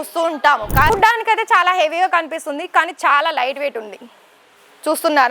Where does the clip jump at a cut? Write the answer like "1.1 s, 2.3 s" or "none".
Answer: 0.9 s

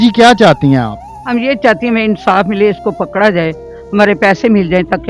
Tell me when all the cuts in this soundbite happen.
none

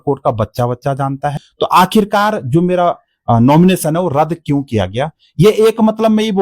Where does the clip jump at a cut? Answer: 1.4 s

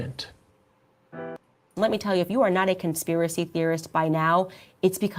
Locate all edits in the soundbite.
1.6 s

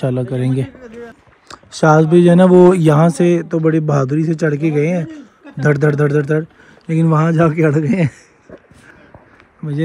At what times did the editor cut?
none

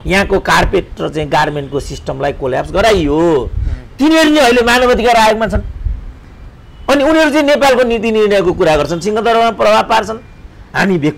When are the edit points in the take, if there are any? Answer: none

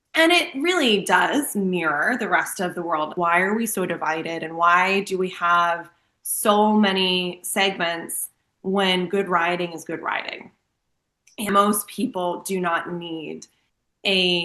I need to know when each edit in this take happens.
3.1 s, 11.5 s

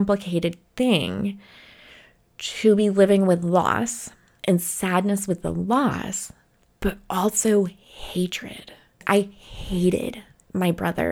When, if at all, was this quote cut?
9.0 s

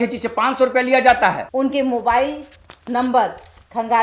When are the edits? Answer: 1.4 s

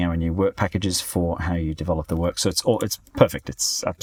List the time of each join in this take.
none

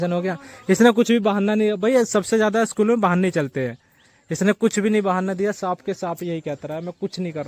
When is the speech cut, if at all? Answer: none

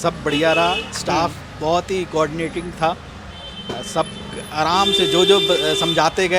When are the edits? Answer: none

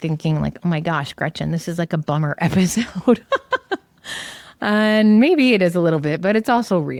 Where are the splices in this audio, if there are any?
none

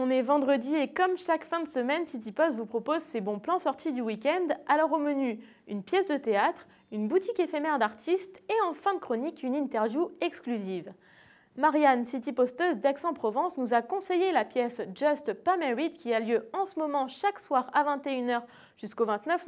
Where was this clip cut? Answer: none

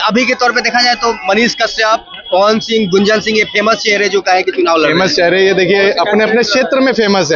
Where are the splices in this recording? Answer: none

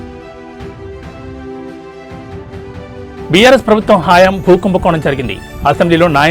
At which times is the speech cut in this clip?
none

